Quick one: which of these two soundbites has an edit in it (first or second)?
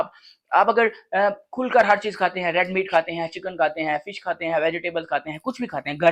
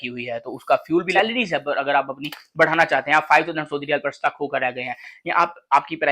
second